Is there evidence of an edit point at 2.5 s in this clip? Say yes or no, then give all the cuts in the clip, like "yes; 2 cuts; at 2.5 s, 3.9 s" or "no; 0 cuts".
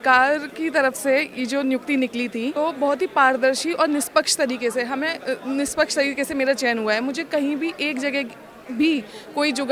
yes; 1 cut; at 2.5 s